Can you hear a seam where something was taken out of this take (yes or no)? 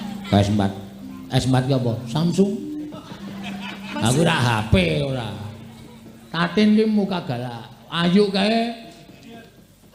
no